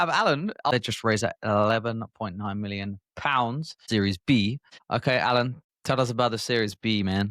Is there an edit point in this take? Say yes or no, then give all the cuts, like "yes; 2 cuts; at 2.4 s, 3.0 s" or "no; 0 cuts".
yes; 4 cuts; at 0.7 s, 3.7 s, 4.7 s, 5.7 s